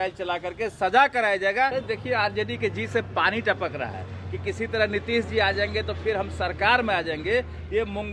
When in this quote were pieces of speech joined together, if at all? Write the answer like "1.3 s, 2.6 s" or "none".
1.7 s

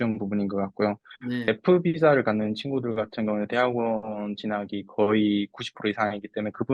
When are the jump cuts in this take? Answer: 1.5 s

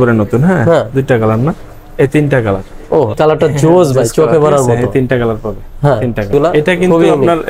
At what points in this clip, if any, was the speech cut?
3.1 s, 6.3 s

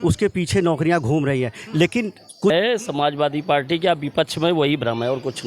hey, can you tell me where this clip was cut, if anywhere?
2.5 s

